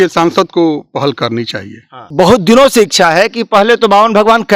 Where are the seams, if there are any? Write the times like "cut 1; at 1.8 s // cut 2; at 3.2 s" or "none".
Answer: cut 1; at 2.0 s